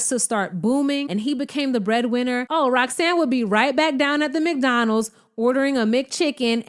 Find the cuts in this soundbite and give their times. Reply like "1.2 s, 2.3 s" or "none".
1.0 s, 2.5 s